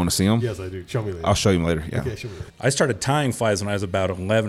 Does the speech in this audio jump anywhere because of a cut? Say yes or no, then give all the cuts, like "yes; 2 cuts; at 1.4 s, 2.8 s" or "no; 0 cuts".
yes; 1 cut; at 2.3 s